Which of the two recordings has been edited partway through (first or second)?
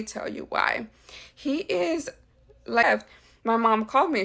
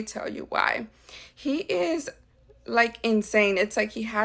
first